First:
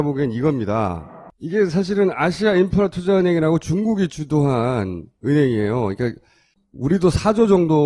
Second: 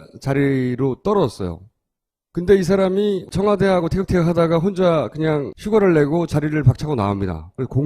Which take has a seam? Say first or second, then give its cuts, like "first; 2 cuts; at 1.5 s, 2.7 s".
second; 1 cut; at 3.5 s